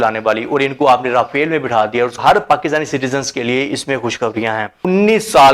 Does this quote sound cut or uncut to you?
cut